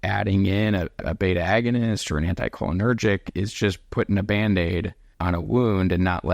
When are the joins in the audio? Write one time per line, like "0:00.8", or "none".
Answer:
0:00.9
0:05.1